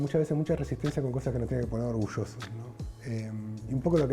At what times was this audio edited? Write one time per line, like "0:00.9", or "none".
none

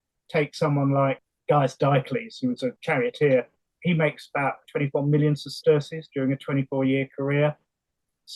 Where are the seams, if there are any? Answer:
0:01.2
0:02.8
0:03.6
0:04.6

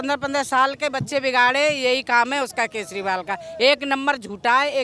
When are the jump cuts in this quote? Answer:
none

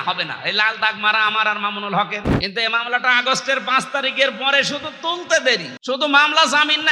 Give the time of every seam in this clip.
0:02.3
0:05.7

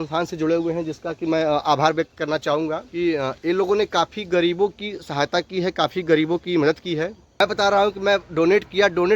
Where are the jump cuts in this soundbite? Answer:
0:02.8
0:07.4

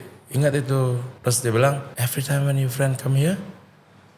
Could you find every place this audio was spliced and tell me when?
0:01.1
0:01.9

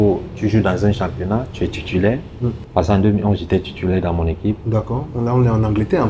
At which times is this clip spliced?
0:02.6

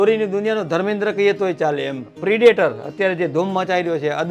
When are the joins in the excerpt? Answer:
0:02.0

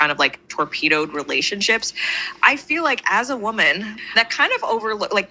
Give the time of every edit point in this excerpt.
none

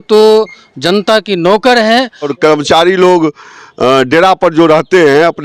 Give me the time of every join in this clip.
0:02.3

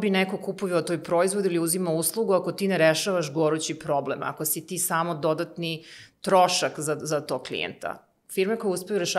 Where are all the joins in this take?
none

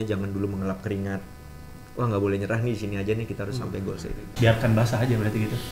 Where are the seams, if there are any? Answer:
0:04.2

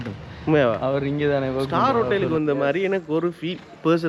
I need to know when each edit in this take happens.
0:01.7

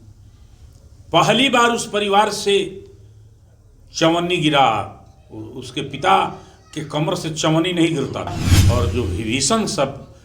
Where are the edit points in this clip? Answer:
0:08.5

